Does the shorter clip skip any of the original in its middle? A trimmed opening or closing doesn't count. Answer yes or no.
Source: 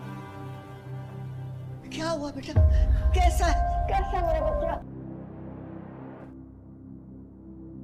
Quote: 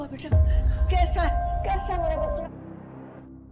yes